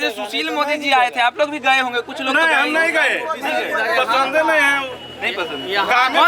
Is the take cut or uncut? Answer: uncut